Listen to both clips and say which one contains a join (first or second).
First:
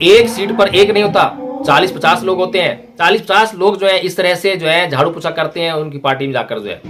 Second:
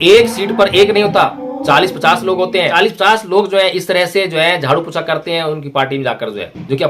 second